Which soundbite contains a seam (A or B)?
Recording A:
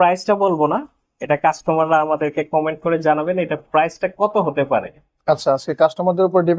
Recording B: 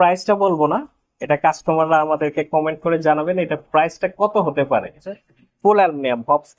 B